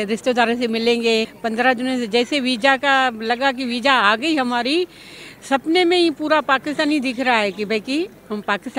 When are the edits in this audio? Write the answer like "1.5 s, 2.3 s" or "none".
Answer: 1.3 s